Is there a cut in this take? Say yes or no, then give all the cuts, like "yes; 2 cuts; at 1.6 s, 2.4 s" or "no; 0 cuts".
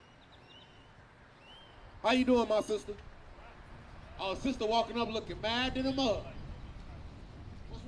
no; 0 cuts